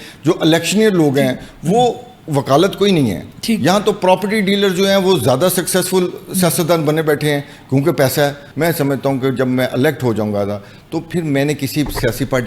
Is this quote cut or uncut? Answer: cut